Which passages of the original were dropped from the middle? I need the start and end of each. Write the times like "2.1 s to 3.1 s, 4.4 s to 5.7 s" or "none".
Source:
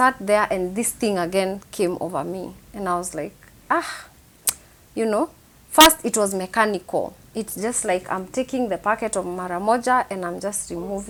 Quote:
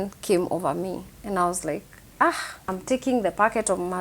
4.2 s to 8.2 s